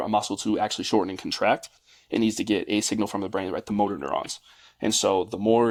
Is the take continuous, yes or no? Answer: yes